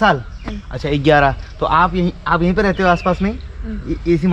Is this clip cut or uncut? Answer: uncut